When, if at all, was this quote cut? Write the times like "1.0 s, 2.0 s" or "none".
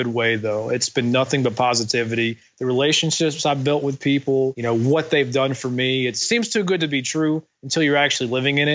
4.6 s, 6.2 s